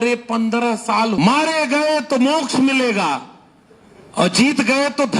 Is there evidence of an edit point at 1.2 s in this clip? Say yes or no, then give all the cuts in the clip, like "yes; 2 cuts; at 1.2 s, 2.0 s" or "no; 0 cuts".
yes; 1 cut; at 1.2 s